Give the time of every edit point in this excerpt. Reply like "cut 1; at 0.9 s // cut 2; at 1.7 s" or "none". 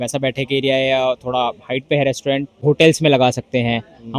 cut 1; at 2.6 s